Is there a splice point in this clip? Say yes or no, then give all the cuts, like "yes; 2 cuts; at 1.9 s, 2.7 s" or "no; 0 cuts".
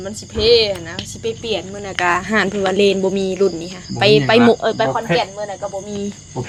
no; 0 cuts